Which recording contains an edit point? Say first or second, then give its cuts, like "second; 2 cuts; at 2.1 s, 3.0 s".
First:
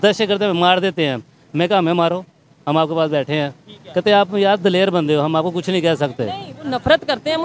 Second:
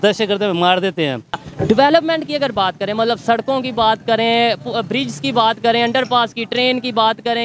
second; 1 cut; at 1.5 s